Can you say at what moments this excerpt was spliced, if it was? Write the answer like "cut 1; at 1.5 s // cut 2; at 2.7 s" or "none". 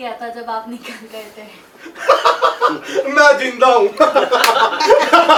none